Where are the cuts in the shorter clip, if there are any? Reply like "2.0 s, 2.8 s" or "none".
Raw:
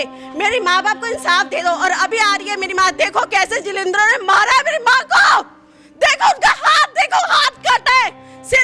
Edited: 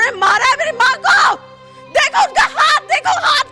none